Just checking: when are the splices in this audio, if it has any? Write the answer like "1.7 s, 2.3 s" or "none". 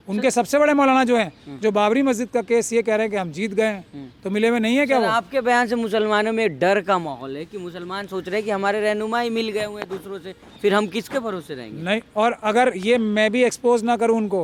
none